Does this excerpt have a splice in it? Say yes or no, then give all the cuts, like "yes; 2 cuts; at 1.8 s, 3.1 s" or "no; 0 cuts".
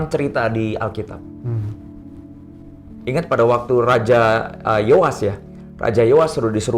no; 0 cuts